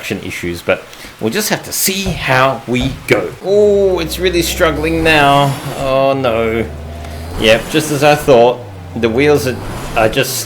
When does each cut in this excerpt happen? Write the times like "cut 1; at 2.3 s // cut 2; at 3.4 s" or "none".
cut 1; at 3.3 s